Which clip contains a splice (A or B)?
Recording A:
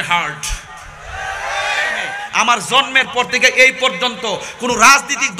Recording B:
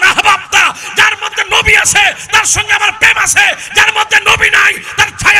A